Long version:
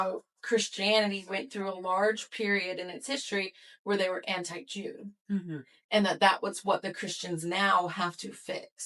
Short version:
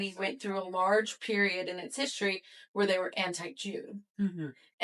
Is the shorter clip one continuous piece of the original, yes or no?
yes